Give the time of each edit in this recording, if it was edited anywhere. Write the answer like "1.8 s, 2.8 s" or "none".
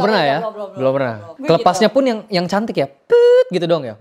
1.3 s